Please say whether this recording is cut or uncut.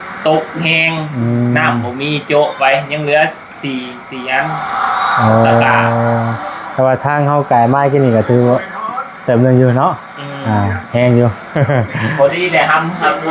uncut